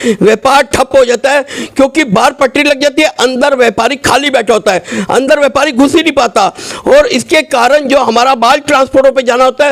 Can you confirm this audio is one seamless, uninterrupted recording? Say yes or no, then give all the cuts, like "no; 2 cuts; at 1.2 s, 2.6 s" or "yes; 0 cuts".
yes; 0 cuts